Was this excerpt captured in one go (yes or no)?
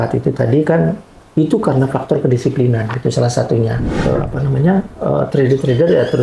no